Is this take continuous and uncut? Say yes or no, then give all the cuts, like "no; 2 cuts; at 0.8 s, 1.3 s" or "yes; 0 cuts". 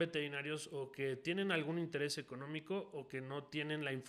yes; 0 cuts